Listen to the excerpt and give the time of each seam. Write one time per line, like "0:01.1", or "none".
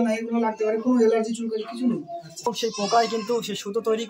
0:02.5